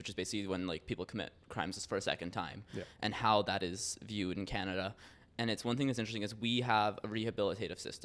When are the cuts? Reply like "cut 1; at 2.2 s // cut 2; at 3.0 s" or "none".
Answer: none